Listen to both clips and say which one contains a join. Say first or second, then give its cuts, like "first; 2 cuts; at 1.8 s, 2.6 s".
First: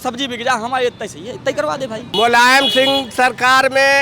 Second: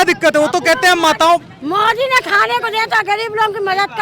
first; 1 cut; at 2.1 s